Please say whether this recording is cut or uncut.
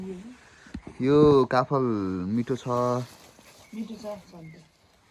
uncut